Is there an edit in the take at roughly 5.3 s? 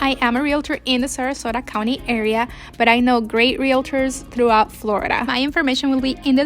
yes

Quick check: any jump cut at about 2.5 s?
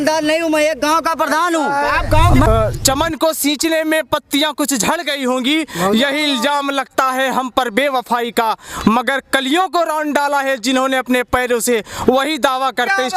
yes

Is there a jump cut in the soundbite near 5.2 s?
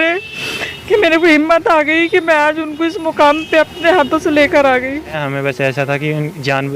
yes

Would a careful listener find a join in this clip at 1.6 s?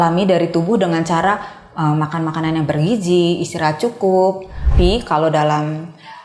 no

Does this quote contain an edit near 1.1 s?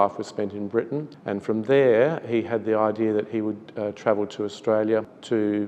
yes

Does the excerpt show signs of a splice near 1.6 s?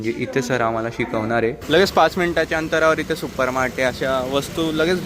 yes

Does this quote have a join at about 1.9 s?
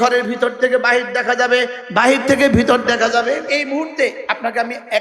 no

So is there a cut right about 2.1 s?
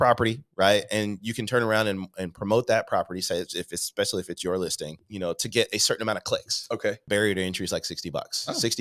no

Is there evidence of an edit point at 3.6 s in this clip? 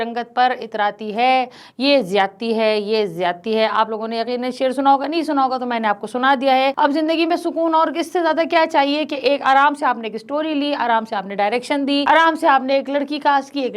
no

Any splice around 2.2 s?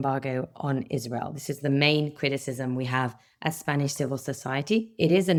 no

